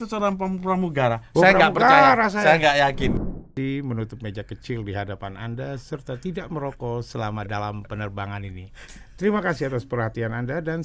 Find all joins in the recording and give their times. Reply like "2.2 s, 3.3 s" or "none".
3.2 s